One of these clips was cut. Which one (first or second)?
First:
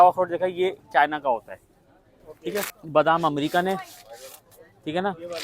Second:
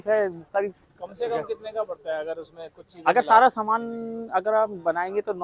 first